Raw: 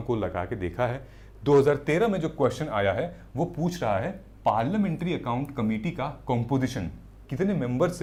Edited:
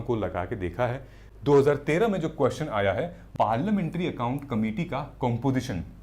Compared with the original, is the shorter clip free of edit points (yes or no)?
no